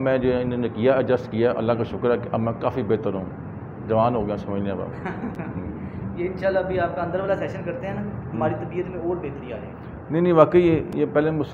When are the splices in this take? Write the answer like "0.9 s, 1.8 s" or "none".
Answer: none